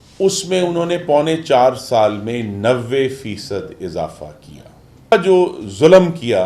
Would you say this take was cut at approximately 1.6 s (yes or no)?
no